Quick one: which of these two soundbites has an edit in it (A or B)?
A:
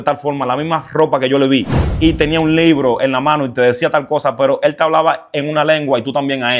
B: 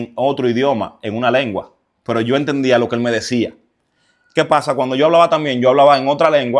A